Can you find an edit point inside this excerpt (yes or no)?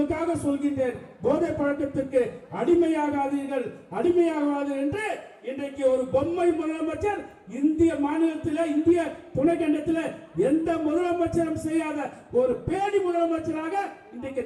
no